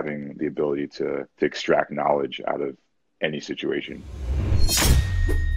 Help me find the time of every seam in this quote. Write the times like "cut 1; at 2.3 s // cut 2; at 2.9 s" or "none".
cut 1; at 1.3 s // cut 2; at 4.4 s

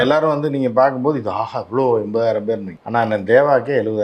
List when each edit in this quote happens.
cut 1; at 2.7 s

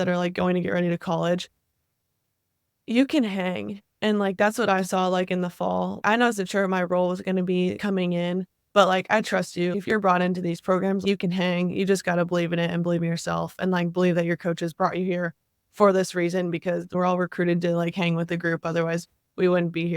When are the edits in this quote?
cut 1; at 1.7 s // cut 2; at 6.0 s // cut 3; at 7.8 s // cut 4; at 9.7 s // cut 5; at 11.0 s // cut 6; at 16.9 s

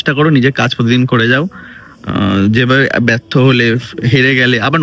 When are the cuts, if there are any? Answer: none

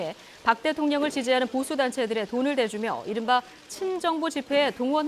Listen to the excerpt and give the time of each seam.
cut 1; at 1.8 s

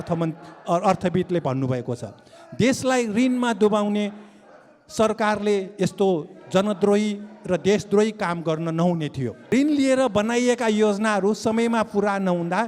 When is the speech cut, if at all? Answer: cut 1; at 9.4 s

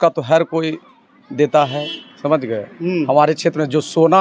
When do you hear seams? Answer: none

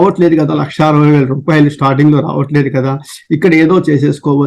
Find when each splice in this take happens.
none

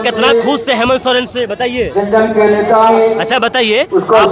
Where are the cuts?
cut 1; at 2.9 s

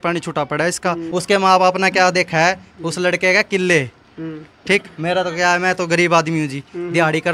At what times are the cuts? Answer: cut 1; at 1.0 s

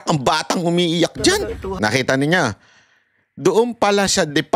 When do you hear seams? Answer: cut 1; at 1.7 s

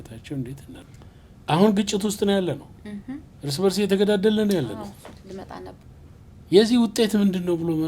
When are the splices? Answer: cut 1; at 0.9 s // cut 2; at 5.8 s

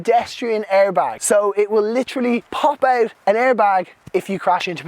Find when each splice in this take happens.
cut 1; at 1.2 s // cut 2; at 2.7 s

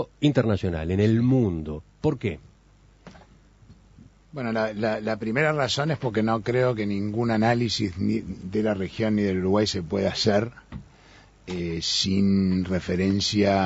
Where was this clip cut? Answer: cut 1; at 2.8 s

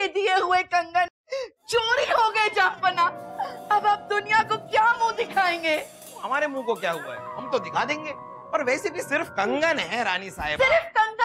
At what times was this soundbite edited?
cut 1; at 1.1 s

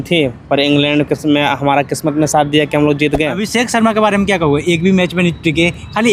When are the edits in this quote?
cut 1; at 3.4 s

